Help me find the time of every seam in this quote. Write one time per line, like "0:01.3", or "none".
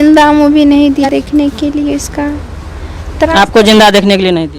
0:01.1